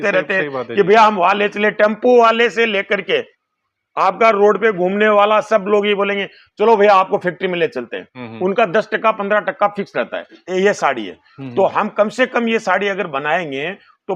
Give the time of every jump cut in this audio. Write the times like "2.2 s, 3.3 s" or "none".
10.4 s